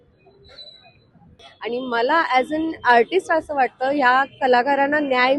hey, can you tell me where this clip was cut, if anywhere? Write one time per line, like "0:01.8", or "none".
0:01.4